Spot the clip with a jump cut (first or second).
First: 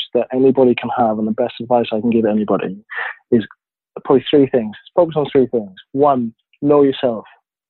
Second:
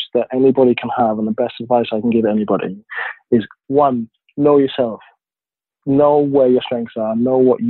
second